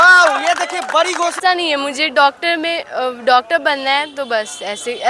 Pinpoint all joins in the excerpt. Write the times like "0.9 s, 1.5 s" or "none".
1.4 s